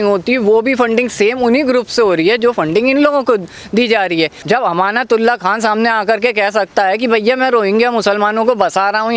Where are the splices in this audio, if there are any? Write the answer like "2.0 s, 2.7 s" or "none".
4.4 s